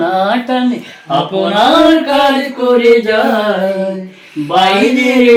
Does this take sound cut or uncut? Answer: uncut